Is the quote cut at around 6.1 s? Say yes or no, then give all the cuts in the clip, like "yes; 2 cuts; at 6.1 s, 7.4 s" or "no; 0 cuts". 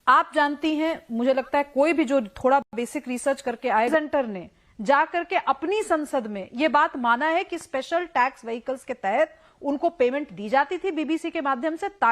no; 1 cut; at 3.9 s